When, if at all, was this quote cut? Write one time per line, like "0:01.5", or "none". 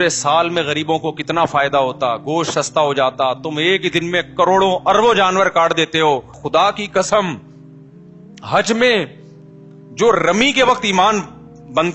0:06.4